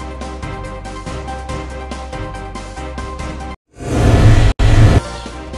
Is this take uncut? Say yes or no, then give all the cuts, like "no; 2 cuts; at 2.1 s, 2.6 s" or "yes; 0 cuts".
no; 2 cuts; at 1.8 s, 3.4 s